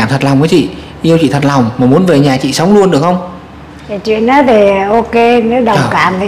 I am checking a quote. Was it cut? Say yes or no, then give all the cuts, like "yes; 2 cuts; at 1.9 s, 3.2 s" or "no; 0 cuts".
no; 0 cuts